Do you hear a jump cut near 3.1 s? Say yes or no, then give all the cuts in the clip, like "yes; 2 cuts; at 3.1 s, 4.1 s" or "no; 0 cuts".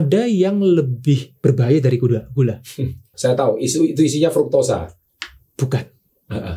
yes; 2 cuts; at 1.3 s, 3.1 s